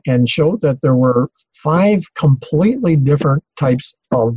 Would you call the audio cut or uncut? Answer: uncut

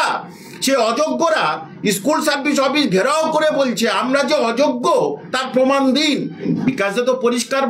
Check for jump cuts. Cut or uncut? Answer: cut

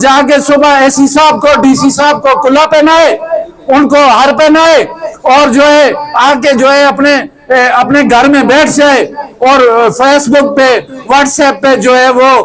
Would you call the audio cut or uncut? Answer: uncut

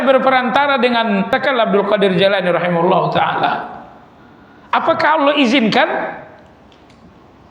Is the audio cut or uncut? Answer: cut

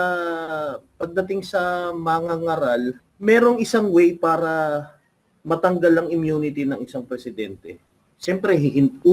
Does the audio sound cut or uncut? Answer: cut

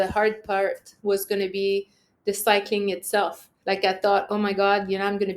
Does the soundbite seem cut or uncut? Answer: cut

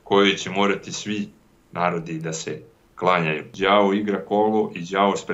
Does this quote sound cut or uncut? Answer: cut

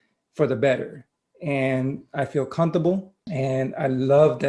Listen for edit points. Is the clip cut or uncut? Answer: cut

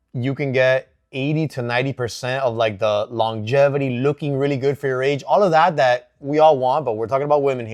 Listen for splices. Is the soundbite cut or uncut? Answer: uncut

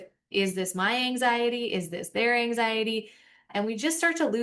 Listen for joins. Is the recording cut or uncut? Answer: uncut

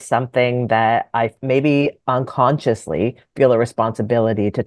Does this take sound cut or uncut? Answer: cut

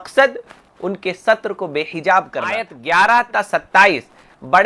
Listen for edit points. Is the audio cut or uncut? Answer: cut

